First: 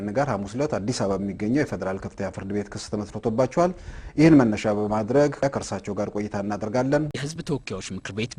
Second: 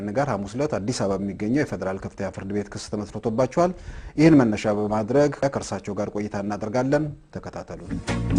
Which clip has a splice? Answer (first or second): first